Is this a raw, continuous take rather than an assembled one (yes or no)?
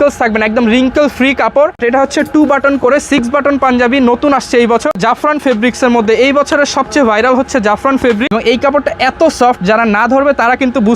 no